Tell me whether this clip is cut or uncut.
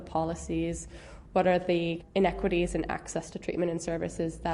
cut